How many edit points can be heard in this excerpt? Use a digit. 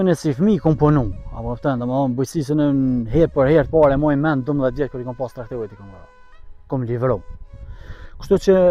0